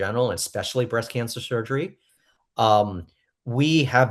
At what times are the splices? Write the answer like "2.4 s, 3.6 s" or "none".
none